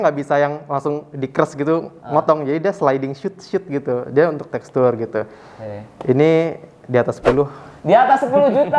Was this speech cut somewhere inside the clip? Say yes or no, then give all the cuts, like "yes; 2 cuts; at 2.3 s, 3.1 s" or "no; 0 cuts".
no; 0 cuts